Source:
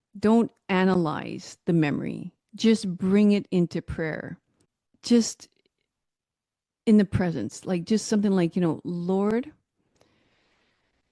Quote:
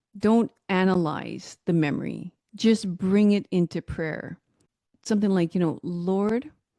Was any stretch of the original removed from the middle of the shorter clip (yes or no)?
yes